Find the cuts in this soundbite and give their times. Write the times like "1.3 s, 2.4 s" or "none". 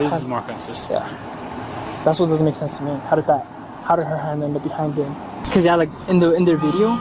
5.4 s